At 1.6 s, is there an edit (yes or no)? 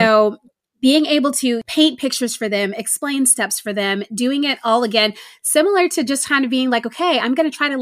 yes